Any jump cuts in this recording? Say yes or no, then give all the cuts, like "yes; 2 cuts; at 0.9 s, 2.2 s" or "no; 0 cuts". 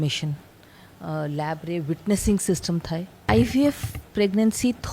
yes; 1 cut; at 3.2 s